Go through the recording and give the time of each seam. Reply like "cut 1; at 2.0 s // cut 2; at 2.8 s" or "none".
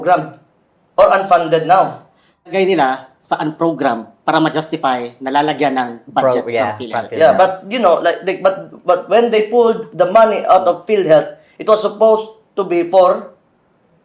cut 1; at 2.5 s

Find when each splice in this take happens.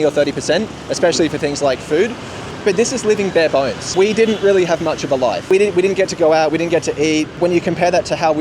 cut 1; at 2.5 s // cut 2; at 3.8 s // cut 3; at 5.4 s // cut 4; at 7.4 s

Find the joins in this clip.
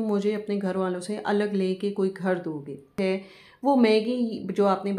cut 1; at 3.0 s

